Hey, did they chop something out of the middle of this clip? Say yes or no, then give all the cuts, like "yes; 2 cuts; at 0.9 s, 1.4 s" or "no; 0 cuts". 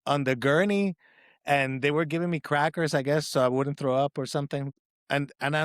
yes; 1 cut; at 4.7 s